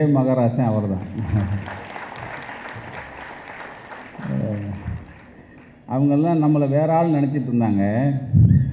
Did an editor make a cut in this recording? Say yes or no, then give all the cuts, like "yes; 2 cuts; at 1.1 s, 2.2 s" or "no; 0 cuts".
no; 0 cuts